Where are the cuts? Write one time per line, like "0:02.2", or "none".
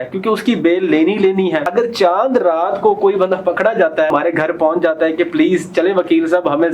0:01.7
0:04.1